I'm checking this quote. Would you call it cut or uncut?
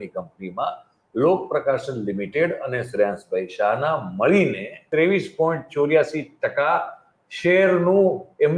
cut